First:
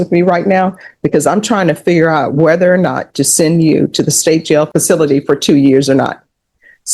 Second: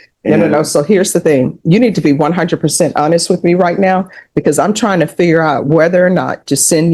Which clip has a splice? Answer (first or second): first